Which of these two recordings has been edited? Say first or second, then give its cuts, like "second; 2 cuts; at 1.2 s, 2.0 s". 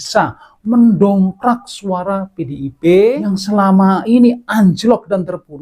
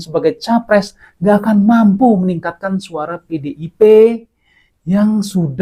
first; 1 cut; at 3.3 s